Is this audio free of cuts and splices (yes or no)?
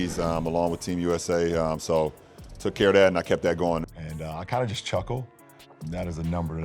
yes